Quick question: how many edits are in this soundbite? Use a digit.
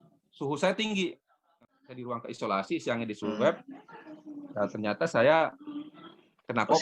1